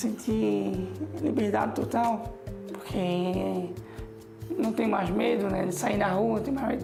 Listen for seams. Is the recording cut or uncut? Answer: uncut